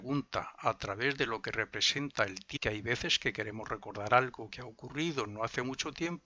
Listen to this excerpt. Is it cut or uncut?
uncut